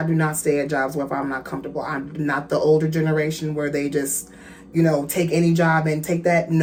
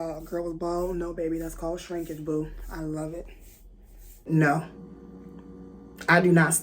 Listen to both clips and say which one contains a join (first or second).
second